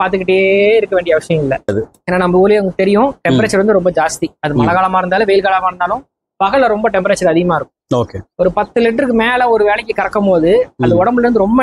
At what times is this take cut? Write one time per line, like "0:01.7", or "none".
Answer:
0:01.7